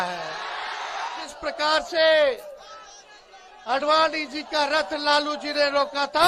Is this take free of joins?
no; 1 cut; at 1.3 s

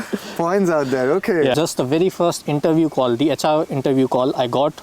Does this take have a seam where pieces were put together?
yes; 1 cut; at 1.5 s

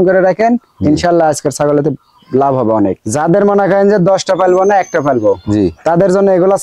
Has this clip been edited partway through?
yes; 1 cut; at 3.0 s

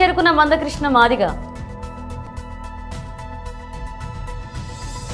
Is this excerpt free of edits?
no; 2 cuts; at 2.3 s, 4.2 s

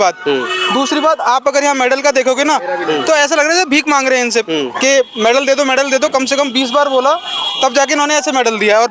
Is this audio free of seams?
yes; 0 cuts

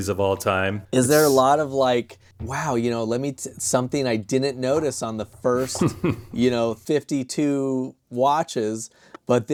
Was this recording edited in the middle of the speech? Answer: no; 0 cuts

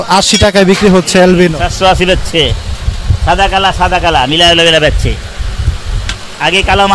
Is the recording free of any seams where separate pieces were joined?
yes; 0 cuts

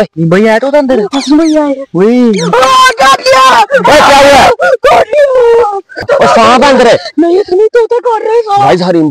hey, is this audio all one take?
no; 1 cut; at 5.5 s

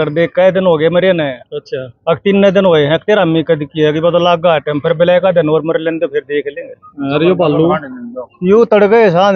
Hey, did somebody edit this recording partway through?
no; 0 cuts

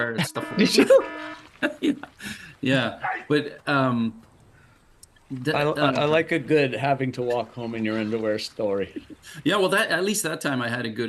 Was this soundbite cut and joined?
no; 0 cuts

